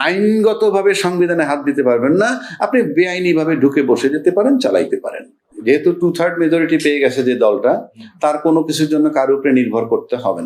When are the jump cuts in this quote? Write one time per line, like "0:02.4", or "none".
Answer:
0:05.5